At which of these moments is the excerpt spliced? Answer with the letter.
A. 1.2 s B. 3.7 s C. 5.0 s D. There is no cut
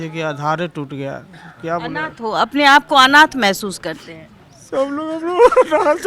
D